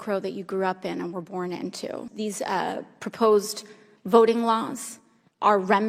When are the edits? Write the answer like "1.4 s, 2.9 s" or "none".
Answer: 2.1 s